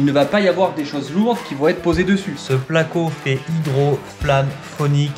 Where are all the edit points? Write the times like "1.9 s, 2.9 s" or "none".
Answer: 2.4 s